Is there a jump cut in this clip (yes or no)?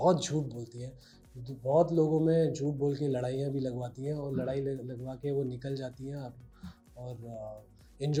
no